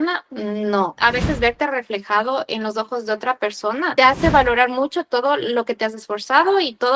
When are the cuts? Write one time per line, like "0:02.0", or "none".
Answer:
0:00.9